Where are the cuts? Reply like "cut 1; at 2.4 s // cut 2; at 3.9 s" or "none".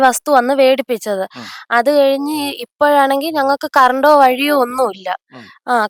none